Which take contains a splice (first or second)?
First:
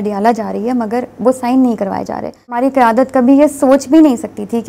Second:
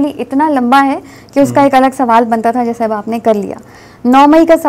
first